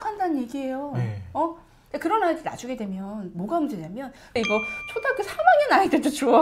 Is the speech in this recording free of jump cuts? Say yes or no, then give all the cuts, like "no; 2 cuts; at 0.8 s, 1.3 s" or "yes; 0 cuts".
no; 2 cuts; at 1.7 s, 4.3 s